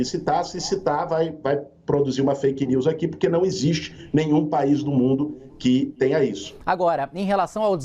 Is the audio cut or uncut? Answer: cut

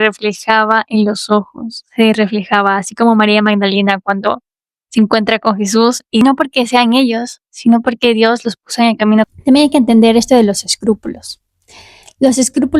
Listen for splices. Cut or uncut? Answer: cut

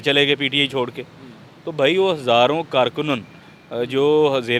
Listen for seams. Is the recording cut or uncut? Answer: uncut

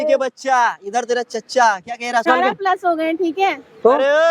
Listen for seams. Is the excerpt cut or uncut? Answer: cut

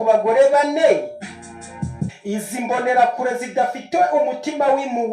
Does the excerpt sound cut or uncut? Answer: cut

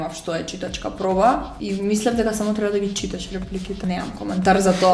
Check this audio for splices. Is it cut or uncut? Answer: cut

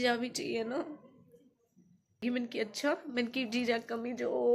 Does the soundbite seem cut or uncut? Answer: cut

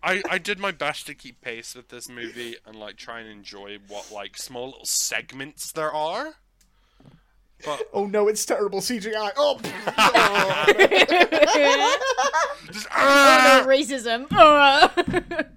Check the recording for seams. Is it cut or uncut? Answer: uncut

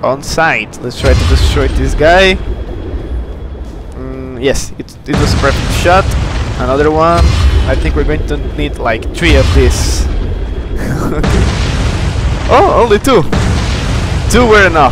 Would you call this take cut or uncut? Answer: uncut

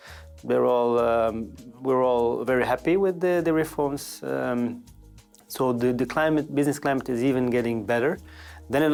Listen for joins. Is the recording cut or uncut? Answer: uncut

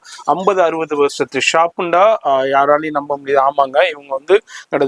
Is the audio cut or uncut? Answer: uncut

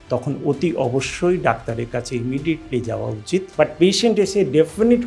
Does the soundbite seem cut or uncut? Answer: cut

